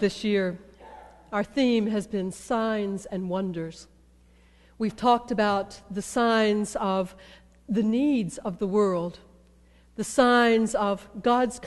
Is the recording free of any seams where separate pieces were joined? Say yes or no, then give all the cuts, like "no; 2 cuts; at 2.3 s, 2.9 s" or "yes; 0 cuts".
yes; 0 cuts